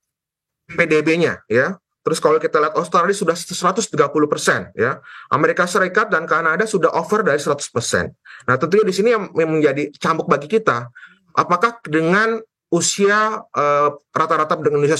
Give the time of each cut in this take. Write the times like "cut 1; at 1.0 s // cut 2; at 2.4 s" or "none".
none